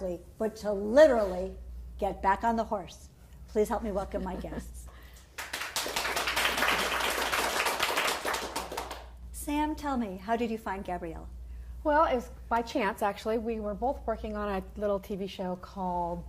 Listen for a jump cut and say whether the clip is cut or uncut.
uncut